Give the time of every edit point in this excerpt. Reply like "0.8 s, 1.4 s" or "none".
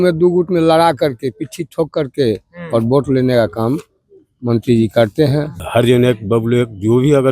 5.6 s